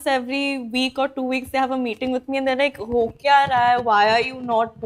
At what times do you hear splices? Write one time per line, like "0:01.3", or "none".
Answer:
none